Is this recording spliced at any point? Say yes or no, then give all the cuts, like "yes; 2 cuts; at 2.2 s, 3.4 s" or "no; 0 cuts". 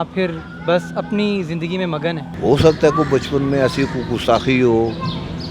yes; 1 cut; at 2.3 s